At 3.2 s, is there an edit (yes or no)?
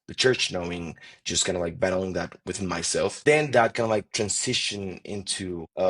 yes